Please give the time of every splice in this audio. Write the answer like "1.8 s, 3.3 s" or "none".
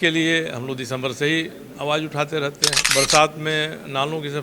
2.8 s